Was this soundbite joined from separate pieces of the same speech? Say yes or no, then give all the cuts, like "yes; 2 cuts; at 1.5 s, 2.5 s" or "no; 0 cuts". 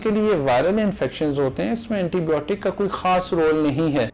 no; 0 cuts